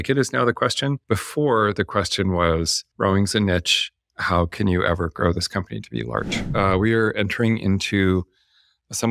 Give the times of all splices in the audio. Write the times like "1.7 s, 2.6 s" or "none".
1.0 s, 2.8 s, 6.4 s

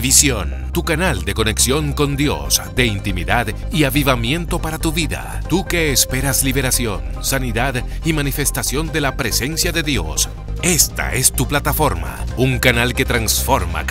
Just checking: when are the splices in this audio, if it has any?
none

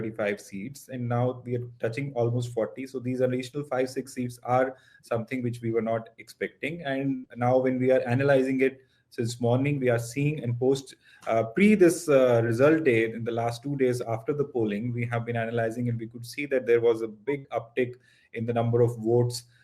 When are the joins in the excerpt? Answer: none

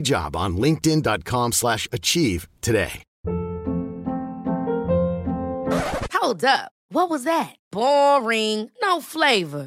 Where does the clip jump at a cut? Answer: none

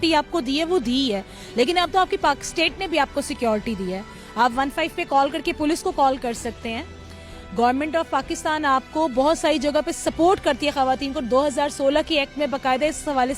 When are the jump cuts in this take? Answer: none

